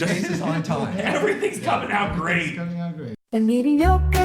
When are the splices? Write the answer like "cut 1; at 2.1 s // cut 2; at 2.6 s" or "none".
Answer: cut 1; at 3.1 s